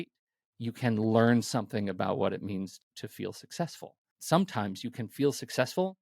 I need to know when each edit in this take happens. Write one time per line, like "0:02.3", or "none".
0:02.8
0:04.1